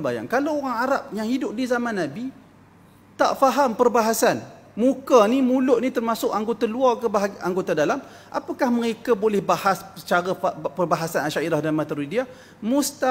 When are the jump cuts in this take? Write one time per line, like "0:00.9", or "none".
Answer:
none